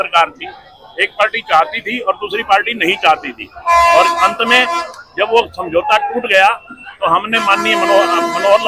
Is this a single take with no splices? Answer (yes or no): yes